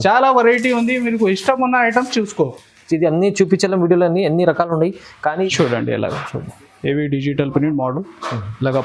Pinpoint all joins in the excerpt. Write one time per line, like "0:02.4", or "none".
0:05.5